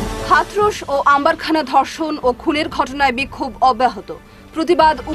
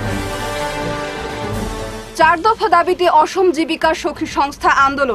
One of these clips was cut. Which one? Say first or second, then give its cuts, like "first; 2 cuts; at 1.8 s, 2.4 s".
second; 1 cut; at 1.4 s